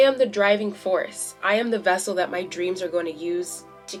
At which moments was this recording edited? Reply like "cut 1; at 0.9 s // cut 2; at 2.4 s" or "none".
none